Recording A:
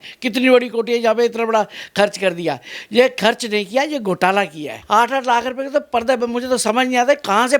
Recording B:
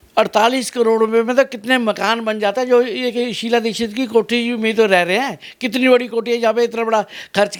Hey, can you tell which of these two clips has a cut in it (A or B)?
A